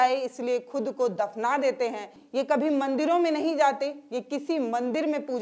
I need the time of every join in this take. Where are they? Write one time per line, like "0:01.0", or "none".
0:02.2